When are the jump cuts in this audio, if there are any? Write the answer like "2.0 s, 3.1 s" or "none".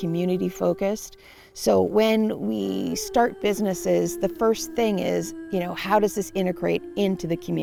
none